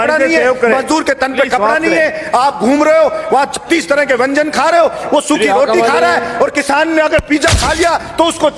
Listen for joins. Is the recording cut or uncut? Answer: uncut